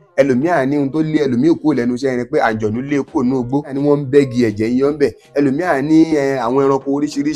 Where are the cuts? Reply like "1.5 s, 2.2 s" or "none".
3.8 s

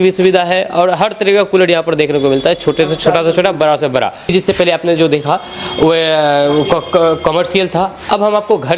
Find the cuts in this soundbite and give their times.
none

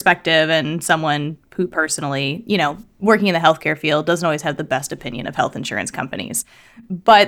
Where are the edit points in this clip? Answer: none

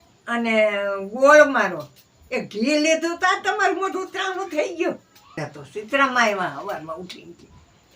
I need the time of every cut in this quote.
5.4 s

